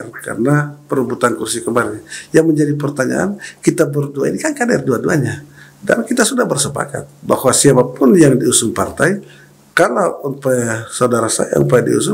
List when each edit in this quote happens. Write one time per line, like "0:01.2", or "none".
none